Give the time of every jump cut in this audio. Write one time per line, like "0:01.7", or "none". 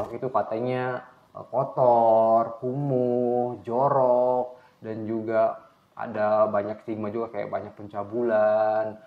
none